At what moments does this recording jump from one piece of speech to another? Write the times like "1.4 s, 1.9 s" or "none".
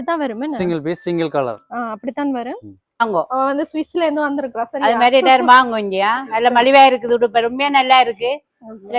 3.0 s